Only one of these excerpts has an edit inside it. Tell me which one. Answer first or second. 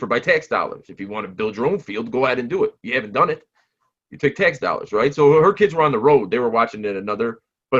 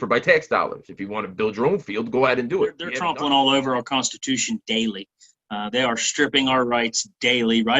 second